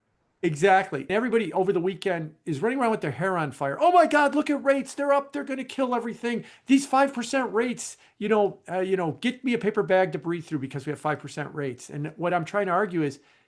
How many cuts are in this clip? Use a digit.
1